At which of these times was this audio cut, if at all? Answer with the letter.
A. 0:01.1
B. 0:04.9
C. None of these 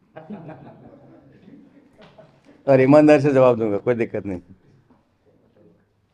C